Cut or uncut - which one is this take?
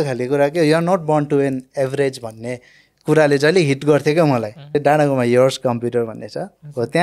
cut